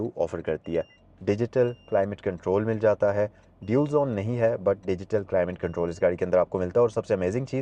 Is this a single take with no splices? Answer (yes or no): no